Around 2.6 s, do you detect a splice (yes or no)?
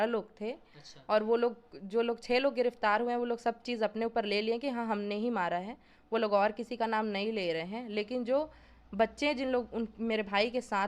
no